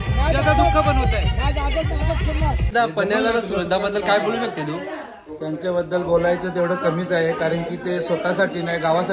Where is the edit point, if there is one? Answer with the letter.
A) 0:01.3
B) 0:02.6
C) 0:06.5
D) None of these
B